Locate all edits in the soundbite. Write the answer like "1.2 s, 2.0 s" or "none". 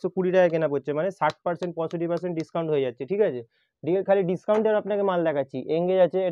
none

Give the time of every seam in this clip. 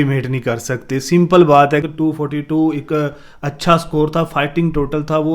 1.9 s

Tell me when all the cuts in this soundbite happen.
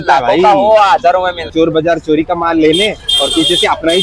1.4 s

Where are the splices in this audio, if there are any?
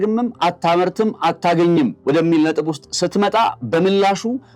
2.0 s

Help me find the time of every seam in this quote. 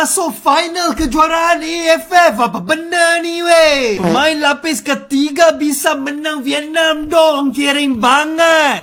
none

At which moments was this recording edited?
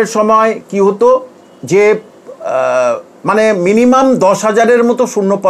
none

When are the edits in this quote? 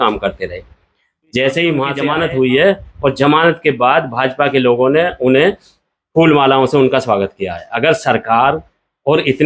2.0 s

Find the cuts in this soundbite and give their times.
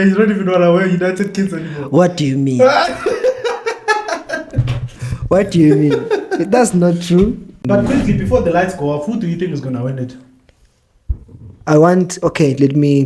7.5 s

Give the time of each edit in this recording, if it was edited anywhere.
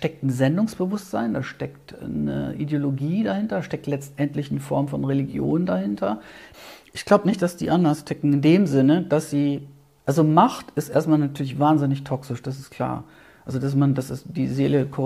6.4 s

